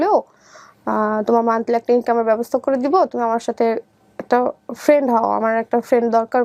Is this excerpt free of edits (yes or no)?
yes